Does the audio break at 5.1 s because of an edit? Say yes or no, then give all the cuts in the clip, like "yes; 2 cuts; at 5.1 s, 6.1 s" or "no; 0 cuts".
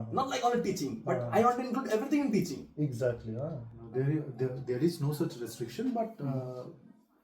no; 1 cut; at 3.9 s